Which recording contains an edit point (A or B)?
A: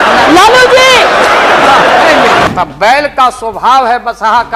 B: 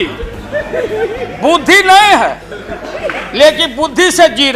A